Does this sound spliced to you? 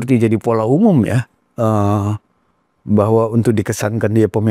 no; 0 cuts

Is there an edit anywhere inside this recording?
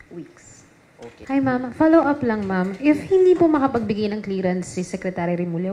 yes; 1 cut; at 1.2 s

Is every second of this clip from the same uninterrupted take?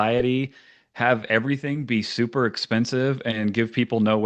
yes; 0 cuts

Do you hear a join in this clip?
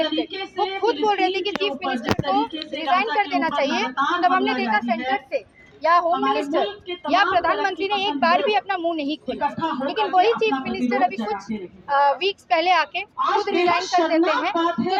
no; 0 cuts

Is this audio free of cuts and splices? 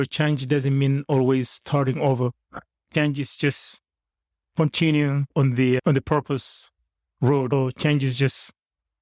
yes; 0 cuts

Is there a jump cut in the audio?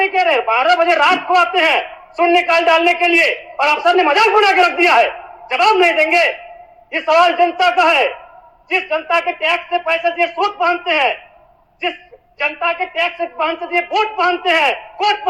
no; 0 cuts

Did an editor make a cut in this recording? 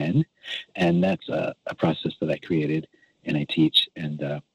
no; 0 cuts

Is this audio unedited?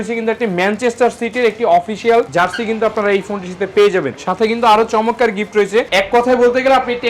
no; 1 cut; at 5.9 s

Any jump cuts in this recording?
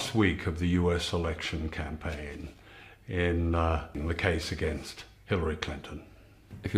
yes; 1 cut; at 1.5 s

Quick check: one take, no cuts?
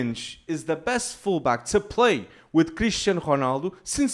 yes; 0 cuts

